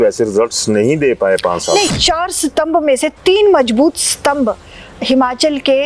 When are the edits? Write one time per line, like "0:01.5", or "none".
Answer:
0:01.9